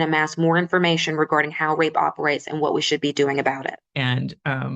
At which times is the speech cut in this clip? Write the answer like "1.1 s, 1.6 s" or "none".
3.8 s